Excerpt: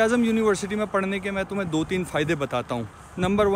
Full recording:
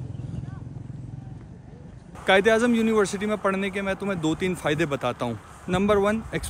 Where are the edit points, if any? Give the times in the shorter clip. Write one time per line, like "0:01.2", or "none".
none

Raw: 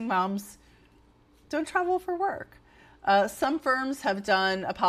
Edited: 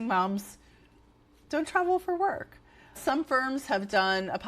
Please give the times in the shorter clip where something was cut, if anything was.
0:03.0

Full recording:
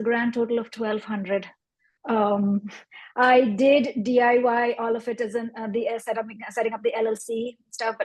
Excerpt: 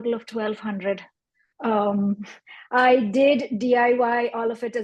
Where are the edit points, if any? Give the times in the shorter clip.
none

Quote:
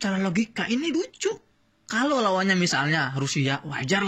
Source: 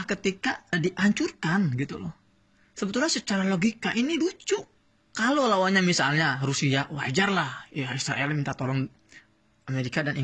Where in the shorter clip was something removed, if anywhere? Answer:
none

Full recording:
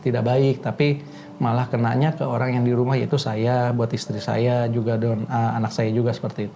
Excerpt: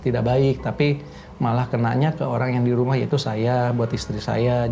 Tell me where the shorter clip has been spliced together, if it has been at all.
none

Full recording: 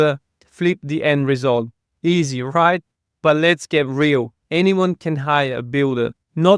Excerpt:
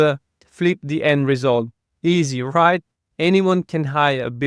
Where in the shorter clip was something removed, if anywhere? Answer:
0:03.1

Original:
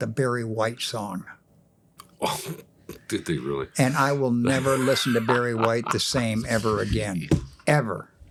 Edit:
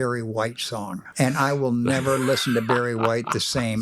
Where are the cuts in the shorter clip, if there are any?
0:01.1

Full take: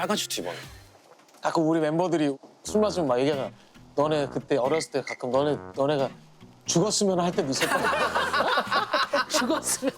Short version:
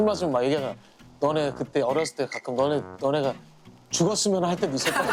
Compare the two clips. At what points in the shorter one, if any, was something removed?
none

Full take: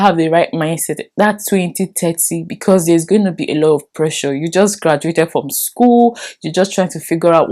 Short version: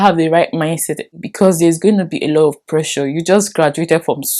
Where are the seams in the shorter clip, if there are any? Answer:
0:01.0

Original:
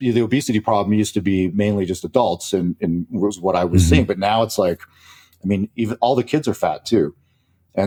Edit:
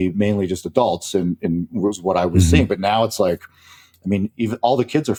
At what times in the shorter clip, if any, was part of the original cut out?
none

